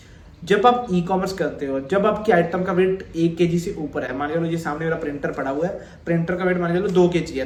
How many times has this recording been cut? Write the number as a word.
zero